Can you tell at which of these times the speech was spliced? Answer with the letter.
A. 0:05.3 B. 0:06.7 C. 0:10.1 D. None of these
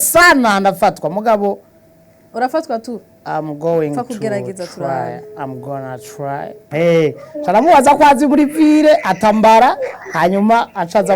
B